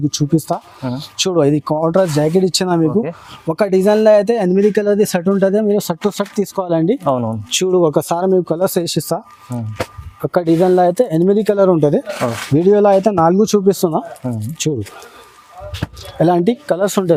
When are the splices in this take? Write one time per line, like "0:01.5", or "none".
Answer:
none